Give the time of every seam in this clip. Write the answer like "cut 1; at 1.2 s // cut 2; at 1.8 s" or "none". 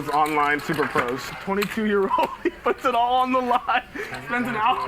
cut 1; at 1.3 s